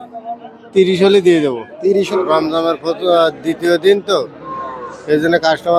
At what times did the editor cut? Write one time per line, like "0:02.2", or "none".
0:02.1